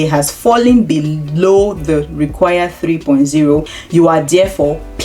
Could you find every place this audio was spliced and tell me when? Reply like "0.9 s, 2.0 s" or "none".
3.7 s

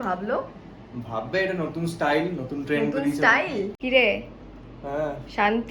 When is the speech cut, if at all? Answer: 3.8 s

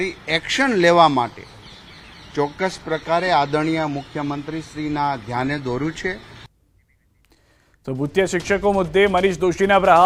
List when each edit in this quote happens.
none

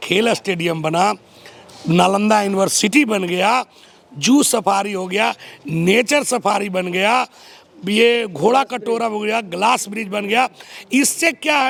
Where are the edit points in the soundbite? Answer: none

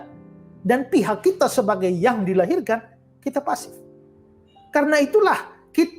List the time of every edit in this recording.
none

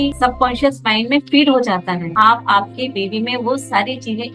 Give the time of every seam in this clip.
2.1 s

